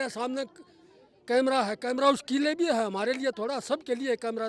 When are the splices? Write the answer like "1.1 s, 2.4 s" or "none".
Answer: none